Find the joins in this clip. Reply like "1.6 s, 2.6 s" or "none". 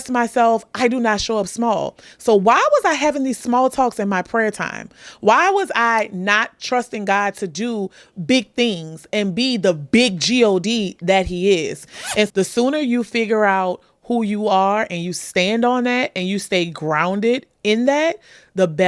12.3 s